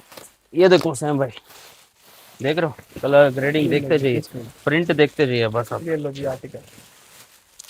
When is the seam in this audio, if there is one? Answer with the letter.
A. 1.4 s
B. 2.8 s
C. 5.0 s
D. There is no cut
D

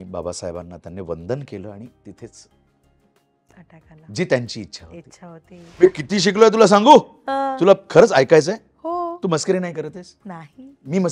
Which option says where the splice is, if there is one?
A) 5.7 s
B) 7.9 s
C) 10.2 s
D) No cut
A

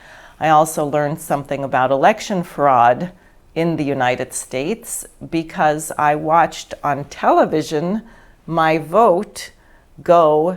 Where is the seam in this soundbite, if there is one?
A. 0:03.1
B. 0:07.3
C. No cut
C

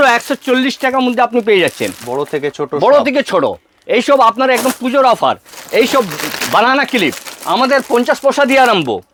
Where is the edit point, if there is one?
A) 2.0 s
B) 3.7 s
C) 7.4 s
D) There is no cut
D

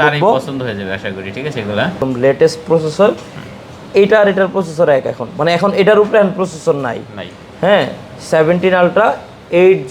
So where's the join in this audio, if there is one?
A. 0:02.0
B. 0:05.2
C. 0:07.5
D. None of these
A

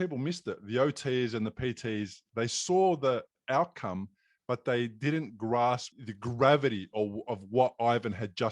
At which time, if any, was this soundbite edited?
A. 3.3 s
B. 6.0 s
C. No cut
B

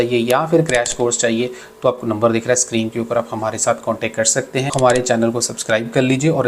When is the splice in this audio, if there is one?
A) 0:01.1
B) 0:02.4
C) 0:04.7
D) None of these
C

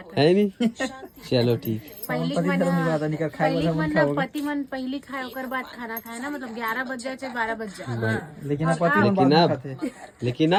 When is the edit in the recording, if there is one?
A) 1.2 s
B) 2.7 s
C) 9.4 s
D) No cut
D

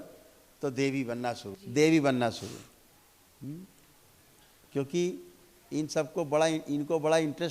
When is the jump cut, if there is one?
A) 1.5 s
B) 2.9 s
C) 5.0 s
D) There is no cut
A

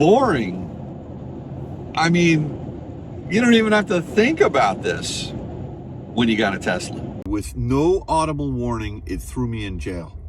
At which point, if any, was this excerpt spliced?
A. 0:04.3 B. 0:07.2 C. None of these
B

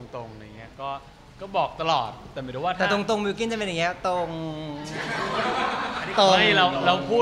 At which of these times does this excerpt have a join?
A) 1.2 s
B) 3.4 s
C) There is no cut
C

